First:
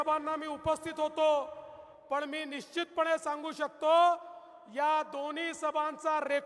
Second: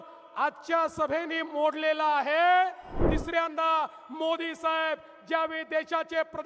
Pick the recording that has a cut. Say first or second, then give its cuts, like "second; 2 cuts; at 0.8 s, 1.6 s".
second; 1 cut; at 3.1 s